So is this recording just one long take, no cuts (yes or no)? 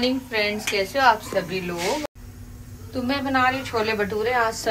yes